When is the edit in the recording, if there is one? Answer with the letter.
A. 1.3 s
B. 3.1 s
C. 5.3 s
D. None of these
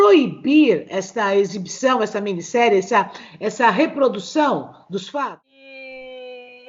C